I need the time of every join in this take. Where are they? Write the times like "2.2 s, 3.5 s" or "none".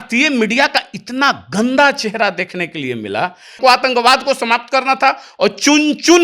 3.6 s